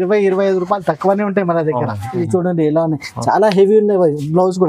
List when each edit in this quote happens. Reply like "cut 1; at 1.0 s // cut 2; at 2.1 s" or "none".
cut 1; at 2.1 s